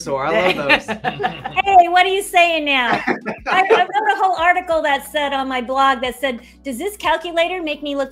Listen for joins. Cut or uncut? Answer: uncut